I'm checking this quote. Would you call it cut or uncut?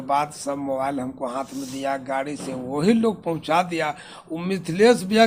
uncut